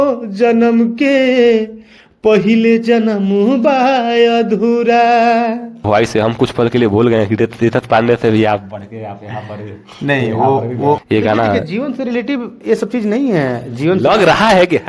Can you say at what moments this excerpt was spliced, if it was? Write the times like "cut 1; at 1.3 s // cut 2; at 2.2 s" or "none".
none